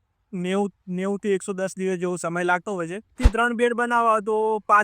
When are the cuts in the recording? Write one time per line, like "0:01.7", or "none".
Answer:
0:03.2